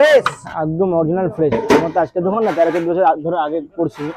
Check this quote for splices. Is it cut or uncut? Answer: uncut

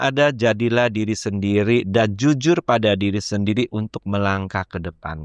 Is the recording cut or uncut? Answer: uncut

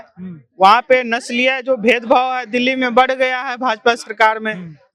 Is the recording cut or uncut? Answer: uncut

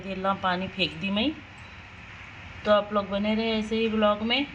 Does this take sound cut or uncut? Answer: uncut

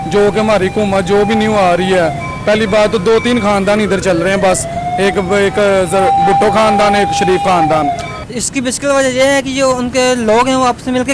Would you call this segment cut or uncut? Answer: cut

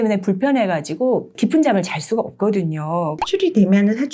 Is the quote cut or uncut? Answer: cut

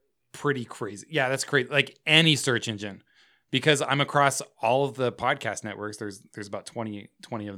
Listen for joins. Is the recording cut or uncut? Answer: uncut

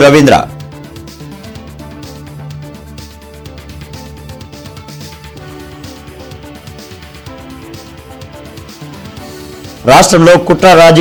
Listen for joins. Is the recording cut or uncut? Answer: uncut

